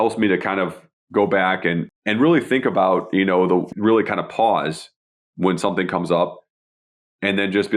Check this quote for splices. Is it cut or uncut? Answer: cut